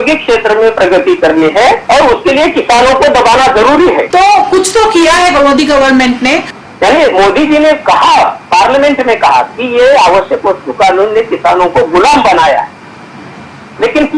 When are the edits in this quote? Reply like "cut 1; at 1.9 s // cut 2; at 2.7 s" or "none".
cut 1; at 1.8 s // cut 2; at 4.1 s // cut 3; at 6.6 s